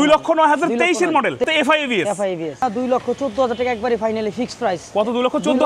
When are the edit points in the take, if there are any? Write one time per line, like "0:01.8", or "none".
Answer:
0:01.4
0:02.6